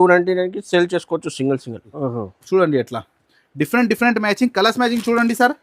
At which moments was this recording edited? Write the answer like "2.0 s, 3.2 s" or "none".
2.0 s

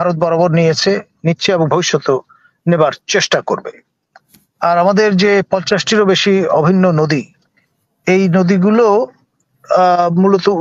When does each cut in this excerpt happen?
none

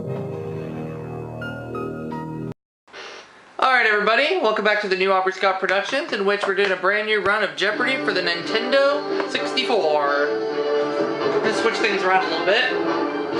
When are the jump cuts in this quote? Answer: none

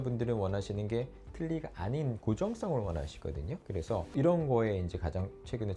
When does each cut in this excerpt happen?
none

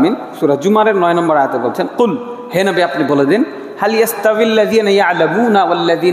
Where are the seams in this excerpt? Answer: none

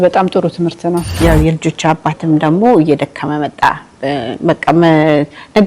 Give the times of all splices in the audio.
1.1 s

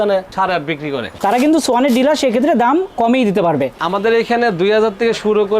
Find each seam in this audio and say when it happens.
1.2 s, 3.7 s

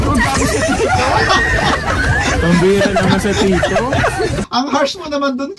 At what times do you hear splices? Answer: 4.4 s

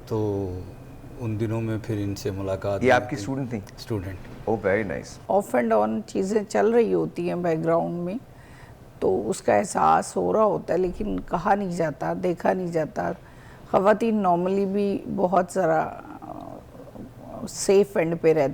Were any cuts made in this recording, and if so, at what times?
5.1 s

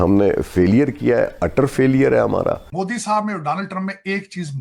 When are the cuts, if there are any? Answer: 2.7 s

